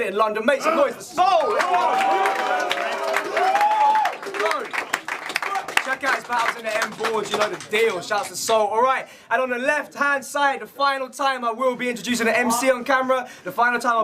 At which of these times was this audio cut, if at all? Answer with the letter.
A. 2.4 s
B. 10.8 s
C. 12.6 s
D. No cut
C